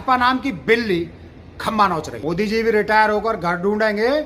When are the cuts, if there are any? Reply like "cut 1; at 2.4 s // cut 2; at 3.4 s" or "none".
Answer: cut 1; at 2.1 s